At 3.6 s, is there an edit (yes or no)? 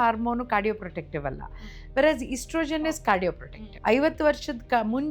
yes